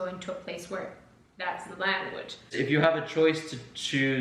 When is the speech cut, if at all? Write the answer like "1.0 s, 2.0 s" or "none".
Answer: 2.5 s